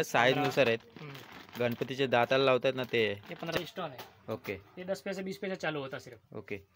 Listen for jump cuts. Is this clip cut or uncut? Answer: cut